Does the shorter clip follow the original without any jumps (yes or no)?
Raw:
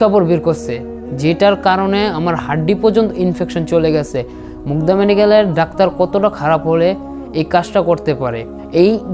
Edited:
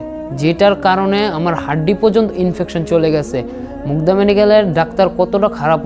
yes